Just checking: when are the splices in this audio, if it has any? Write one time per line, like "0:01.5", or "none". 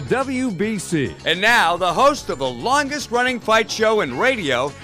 0:01.2